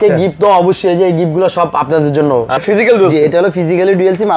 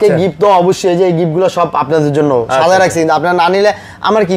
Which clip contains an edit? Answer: first; 1 cut; at 2.6 s

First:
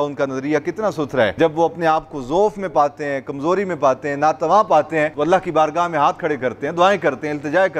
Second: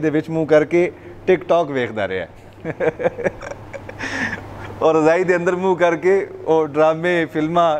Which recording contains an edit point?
first; 2 cuts; at 1.3 s, 5.1 s

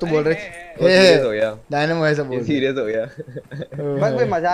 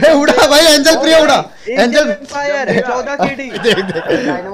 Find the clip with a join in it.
second; 1 cut; at 3.6 s

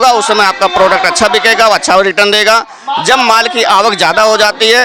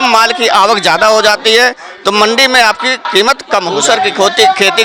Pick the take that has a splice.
second; 1 cut; at 3.7 s

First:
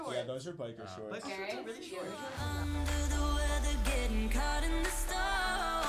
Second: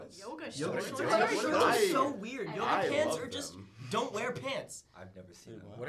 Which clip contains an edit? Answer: first; 1 cut; at 2.3 s

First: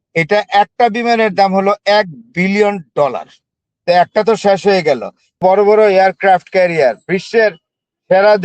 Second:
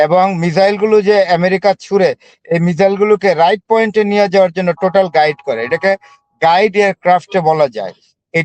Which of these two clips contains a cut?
first; 1 cut; at 5.4 s

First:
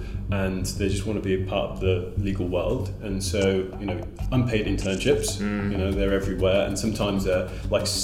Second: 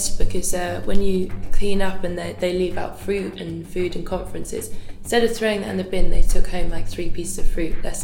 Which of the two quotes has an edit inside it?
second; 1 cut; at 1.5 s

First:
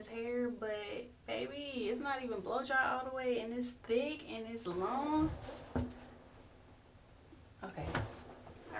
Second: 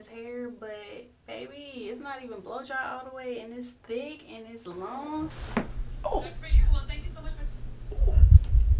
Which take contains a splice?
second; 1 cut; at 5.4 s

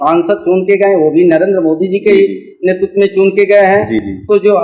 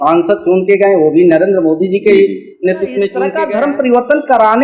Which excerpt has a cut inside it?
second; 1 cut; at 3.3 s

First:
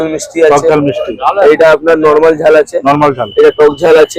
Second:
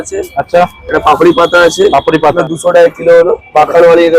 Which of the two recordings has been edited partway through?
second; 1 cut; at 2.4 s

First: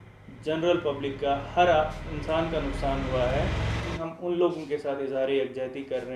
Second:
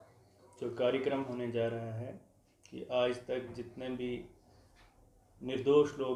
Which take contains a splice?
first; 1 cut; at 4.0 s

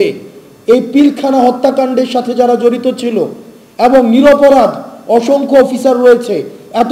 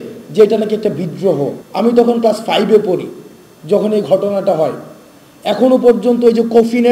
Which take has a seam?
second; 1 cut; at 1.6 s

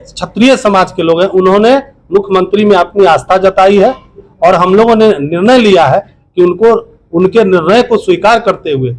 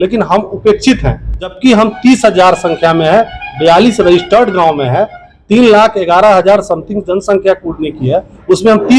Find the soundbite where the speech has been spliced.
second; 1 cut; at 1.5 s

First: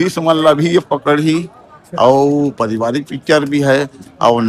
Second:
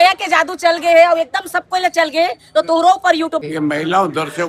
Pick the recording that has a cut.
second; 1 cut; at 3.4 s

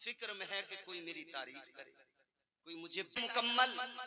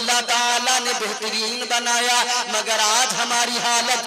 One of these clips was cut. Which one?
first; 1 cut; at 3.2 s

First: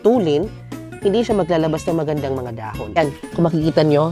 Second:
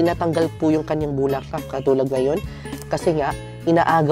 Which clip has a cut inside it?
first; 1 cut; at 2.8 s

